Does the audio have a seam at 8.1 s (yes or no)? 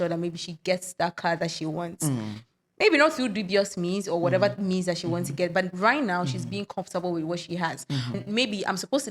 yes